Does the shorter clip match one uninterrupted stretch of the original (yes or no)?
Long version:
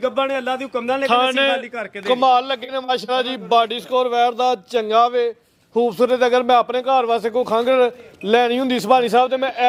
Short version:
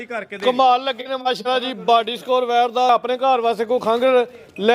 no